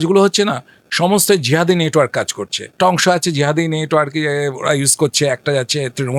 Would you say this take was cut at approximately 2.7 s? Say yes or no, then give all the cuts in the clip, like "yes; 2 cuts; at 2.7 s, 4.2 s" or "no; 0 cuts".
yes; 1 cut; at 2.7 s